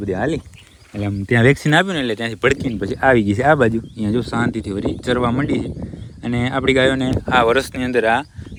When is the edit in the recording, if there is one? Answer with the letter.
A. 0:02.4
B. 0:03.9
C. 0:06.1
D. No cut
D